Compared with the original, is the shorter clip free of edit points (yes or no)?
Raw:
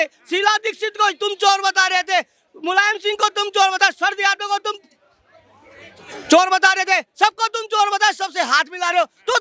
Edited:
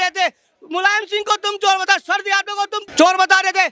no